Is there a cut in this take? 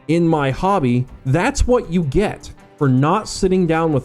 yes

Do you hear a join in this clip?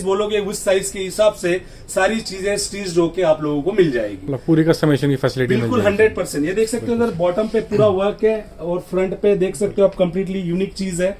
no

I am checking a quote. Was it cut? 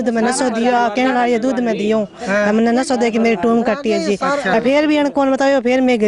no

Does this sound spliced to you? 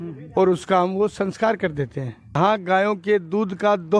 yes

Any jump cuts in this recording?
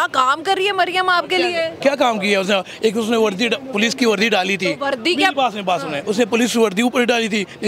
no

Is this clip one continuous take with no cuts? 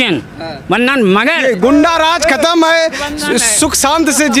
no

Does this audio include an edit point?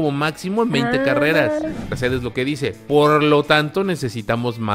yes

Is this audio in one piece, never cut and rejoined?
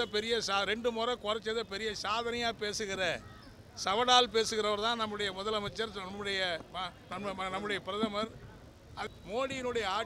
no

